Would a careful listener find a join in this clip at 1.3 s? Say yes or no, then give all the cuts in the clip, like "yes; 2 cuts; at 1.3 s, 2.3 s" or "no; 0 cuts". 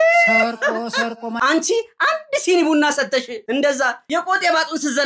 yes; 1 cut; at 1.3 s